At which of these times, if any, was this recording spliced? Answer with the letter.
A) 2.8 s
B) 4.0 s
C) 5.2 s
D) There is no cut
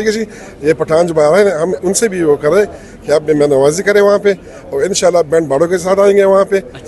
D